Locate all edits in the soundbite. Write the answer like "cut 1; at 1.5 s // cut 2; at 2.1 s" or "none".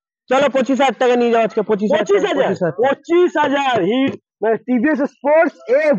none